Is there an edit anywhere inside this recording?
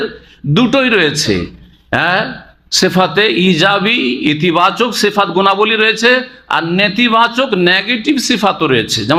no; 0 cuts

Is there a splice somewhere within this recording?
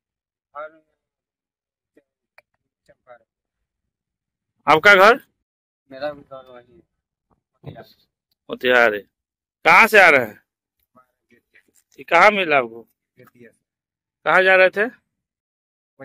no; 0 cuts

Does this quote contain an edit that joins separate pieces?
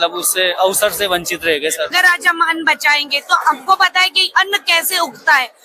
yes; 1 cut; at 1.9 s

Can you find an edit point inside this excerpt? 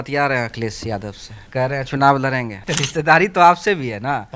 yes; 2 cuts; at 1.3 s, 2.6 s

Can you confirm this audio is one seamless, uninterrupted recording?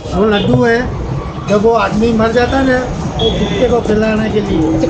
yes; 0 cuts

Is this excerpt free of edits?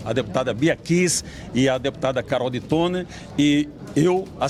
yes; 0 cuts

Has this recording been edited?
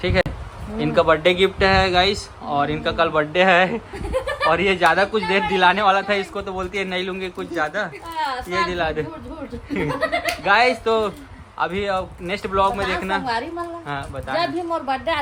no; 0 cuts

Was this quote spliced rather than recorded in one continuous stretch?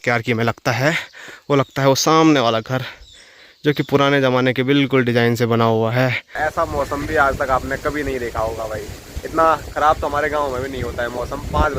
yes; 1 cut; at 6.3 s

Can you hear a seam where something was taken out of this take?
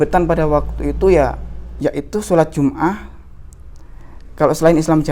yes; 1 cut; at 1.6 s

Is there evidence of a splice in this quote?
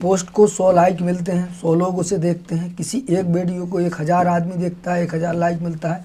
no; 0 cuts

